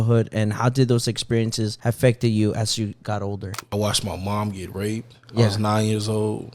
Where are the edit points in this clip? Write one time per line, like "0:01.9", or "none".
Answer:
0:03.5

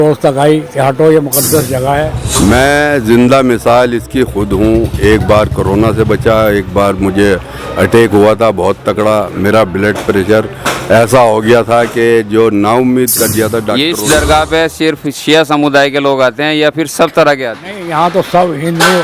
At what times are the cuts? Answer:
0:02.2
0:13.8

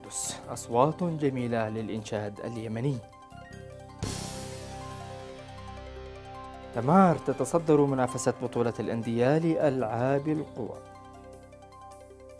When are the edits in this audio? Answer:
none

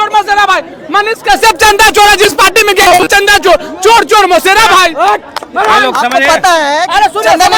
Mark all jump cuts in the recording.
none

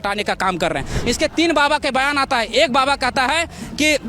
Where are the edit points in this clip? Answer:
0:00.9

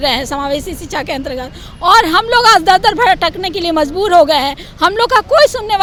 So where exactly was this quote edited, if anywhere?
none

